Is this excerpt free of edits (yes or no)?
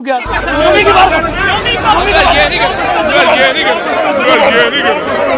yes